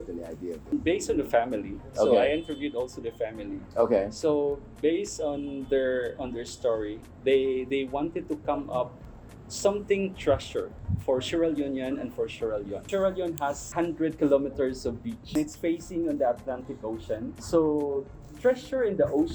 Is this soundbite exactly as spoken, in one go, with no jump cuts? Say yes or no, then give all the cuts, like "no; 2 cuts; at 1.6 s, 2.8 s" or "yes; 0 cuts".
yes; 0 cuts